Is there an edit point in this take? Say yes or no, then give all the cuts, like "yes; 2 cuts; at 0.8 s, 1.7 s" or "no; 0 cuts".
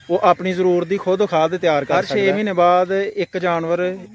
yes; 1 cut; at 2.0 s